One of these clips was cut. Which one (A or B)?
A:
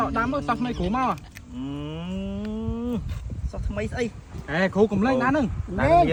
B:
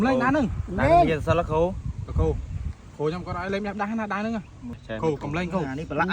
B